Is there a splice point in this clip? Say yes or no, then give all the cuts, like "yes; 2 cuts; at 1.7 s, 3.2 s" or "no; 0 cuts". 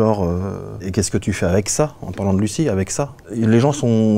yes; 2 cuts; at 0.8 s, 3.2 s